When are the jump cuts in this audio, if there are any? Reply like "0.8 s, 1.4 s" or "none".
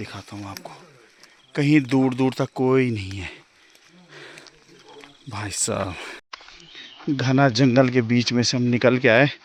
none

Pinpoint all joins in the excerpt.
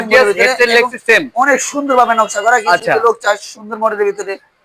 none

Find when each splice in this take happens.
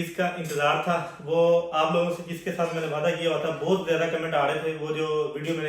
none

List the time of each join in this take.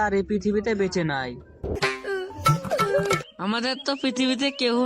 1.7 s, 3.2 s

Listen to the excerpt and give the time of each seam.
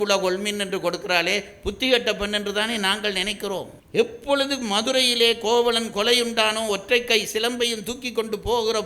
3.8 s

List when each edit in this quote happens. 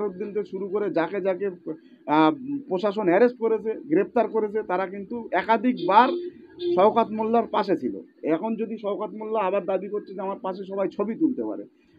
none

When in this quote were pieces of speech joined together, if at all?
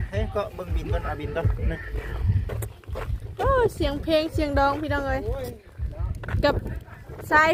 none

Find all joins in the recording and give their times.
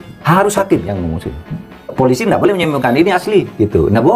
1.9 s

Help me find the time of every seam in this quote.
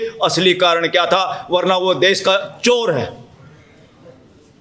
none

